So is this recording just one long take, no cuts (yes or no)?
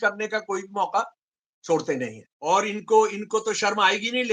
no